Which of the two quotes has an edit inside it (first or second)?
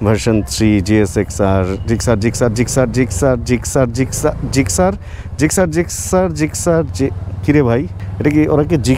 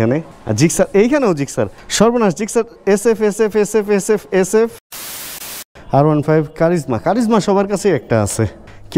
second